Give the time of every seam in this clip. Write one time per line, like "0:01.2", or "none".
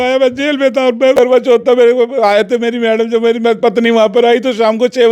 0:01.2